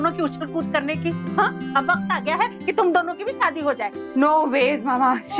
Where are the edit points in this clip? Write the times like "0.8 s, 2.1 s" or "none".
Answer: 1.6 s